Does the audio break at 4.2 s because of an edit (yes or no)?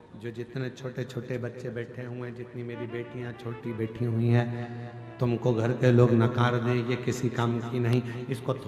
no